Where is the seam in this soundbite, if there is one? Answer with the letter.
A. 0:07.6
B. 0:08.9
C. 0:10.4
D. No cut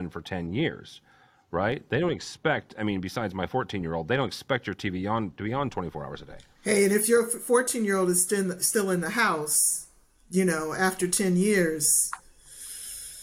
D